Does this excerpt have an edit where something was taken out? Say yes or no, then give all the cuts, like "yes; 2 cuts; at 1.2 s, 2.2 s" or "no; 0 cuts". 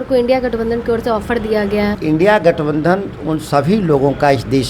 yes; 1 cut; at 2.0 s